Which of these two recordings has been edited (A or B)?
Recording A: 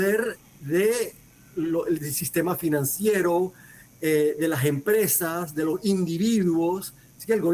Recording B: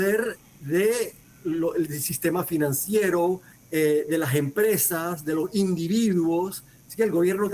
B